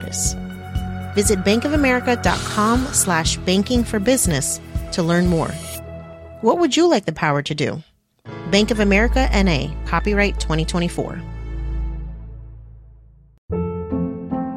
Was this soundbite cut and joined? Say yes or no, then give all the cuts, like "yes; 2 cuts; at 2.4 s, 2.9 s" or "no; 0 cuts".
no; 0 cuts